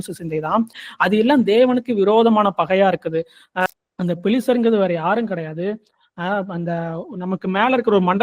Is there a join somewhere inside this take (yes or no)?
yes